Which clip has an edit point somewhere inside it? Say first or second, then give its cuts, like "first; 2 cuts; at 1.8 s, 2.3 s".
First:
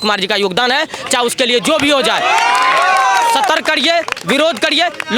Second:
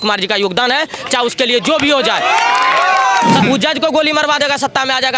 second; 1 cut; at 3.4 s